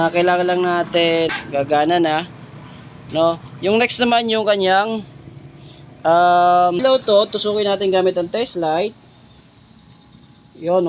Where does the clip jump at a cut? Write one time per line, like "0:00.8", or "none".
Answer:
0:01.3
0:06.8

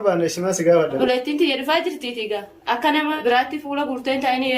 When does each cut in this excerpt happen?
0:03.2

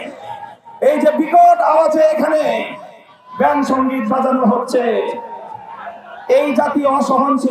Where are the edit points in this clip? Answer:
none

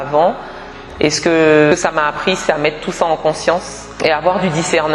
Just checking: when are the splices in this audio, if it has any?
0:01.7
0:03.9

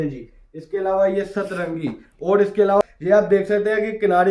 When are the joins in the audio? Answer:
0:02.8

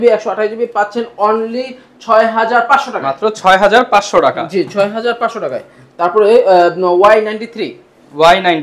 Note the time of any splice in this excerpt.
none

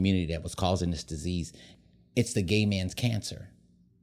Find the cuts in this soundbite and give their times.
0:01.6

